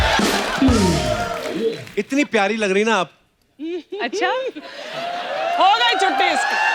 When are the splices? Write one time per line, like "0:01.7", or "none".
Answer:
0:01.8